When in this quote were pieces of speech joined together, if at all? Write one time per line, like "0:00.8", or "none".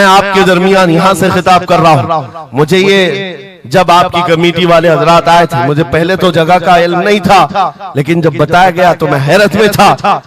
none